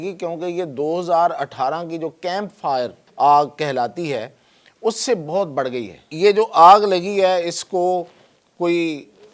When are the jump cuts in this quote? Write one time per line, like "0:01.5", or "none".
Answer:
0:03.0
0:06.1